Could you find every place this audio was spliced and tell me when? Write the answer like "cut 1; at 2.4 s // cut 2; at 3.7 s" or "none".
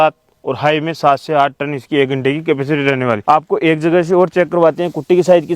cut 1; at 3.2 s